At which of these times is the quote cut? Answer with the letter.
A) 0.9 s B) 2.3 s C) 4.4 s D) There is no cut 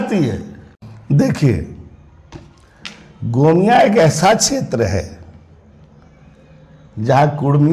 A